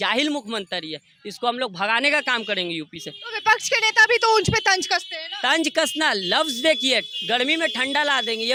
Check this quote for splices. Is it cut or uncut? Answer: uncut